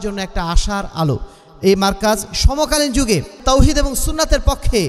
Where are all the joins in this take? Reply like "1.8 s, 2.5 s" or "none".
3.4 s